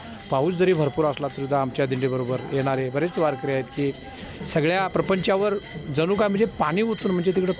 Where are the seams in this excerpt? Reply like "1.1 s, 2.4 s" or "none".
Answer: none